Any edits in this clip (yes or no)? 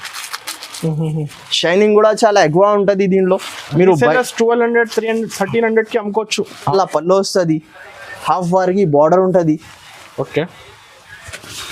yes